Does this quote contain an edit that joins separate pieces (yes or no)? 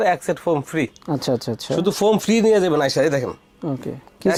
no